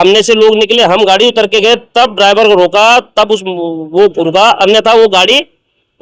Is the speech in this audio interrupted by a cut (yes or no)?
no